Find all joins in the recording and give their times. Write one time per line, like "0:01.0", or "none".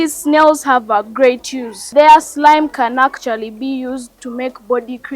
0:01.8